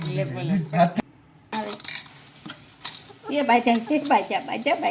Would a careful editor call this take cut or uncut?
cut